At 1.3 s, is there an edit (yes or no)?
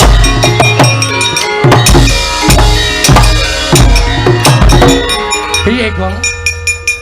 no